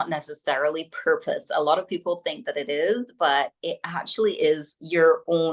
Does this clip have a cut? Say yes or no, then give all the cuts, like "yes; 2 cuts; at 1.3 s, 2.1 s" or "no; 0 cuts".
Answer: no; 0 cuts